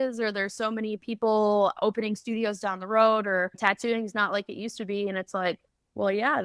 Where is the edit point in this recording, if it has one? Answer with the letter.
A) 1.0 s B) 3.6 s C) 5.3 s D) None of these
B